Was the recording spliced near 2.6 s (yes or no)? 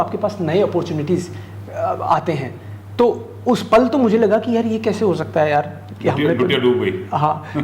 no